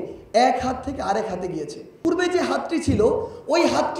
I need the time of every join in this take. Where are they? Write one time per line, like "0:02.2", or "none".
0:02.0